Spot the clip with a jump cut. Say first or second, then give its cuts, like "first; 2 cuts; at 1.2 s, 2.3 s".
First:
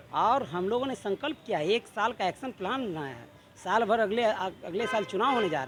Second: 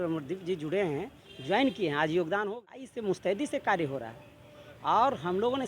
second; 1 cut; at 2.9 s